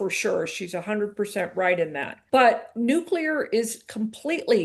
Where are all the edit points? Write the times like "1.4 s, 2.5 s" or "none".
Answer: 2.1 s, 2.7 s